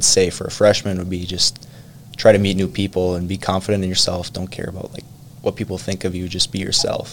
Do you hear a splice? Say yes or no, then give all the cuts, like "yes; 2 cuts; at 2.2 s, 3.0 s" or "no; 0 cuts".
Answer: no; 0 cuts